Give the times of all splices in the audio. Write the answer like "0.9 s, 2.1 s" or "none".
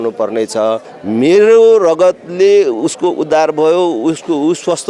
0.9 s